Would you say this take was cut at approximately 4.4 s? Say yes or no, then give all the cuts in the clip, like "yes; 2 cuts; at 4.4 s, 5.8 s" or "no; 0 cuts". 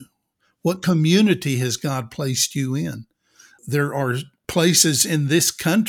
yes; 2 cuts; at 3.6 s, 4.4 s